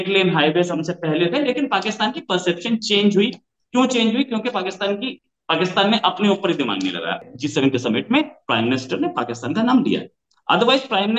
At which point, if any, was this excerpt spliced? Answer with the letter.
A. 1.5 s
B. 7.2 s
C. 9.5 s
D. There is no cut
B